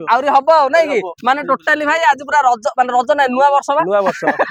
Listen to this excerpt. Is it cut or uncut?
uncut